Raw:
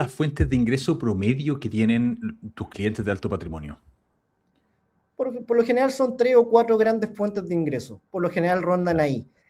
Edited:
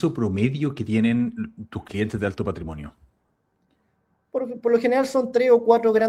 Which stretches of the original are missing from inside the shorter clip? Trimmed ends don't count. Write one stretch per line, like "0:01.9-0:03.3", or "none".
none